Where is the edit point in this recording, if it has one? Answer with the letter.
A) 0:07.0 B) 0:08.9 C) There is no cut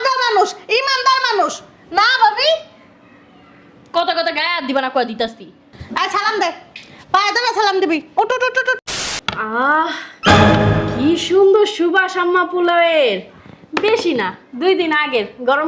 B